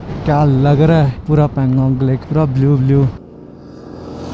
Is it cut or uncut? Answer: cut